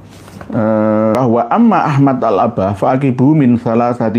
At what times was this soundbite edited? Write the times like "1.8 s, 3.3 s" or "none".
1.1 s